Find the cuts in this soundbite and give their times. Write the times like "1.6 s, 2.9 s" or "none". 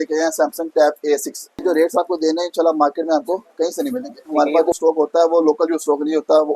1.6 s, 4.5 s